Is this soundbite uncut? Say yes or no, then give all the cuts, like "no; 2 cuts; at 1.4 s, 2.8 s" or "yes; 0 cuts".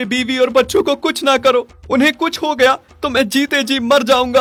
yes; 0 cuts